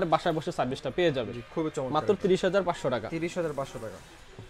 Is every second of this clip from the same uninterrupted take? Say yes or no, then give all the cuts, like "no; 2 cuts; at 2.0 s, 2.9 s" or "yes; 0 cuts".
yes; 0 cuts